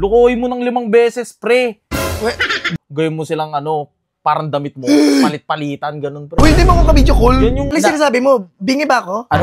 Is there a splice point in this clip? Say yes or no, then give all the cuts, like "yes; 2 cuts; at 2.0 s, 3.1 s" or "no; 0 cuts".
yes; 2 cuts; at 2.6 s, 7.6 s